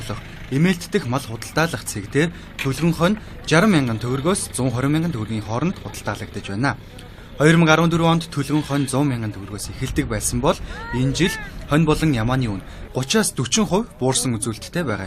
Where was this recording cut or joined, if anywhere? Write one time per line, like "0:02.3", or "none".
0:12.2